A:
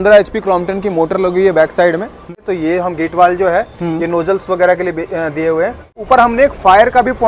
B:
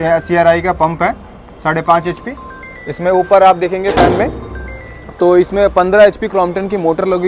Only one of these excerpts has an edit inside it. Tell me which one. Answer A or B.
A